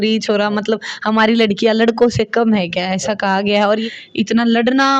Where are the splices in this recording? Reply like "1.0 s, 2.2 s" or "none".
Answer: 3.9 s